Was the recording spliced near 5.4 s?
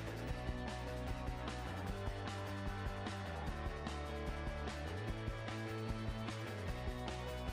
no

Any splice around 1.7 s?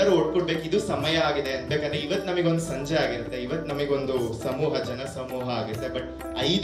yes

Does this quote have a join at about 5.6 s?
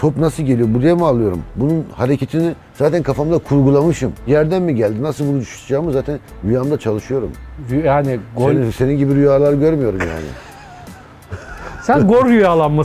no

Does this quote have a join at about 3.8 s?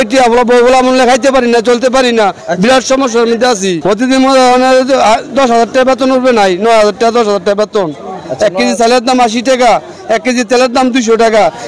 yes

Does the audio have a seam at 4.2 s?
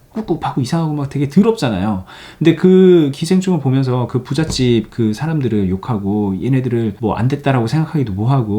no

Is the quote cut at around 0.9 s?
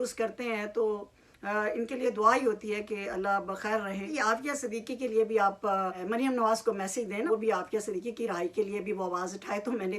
no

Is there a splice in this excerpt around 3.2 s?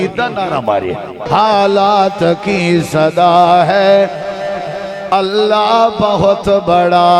no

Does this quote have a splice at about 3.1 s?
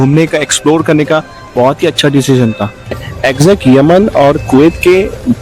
yes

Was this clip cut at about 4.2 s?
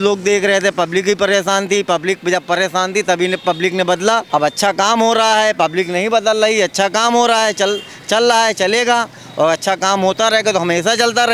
yes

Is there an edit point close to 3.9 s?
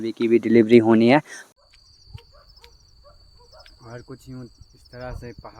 no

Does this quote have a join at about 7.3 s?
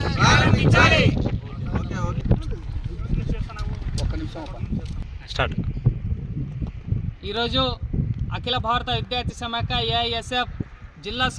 no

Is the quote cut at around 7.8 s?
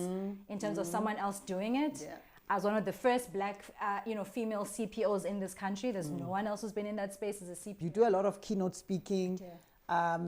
yes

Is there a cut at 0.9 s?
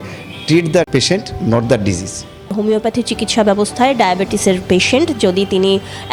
yes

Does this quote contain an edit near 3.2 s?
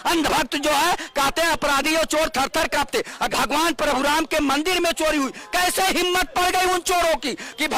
yes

